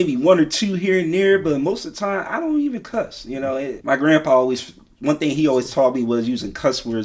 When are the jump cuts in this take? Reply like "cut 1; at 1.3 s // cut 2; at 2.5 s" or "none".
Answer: cut 1; at 3.8 s